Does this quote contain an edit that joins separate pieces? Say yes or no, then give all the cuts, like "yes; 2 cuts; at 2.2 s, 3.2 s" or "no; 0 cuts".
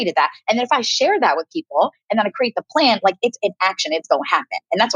no; 0 cuts